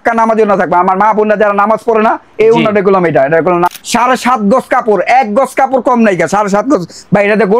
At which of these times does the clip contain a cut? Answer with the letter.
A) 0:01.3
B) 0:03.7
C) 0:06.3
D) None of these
B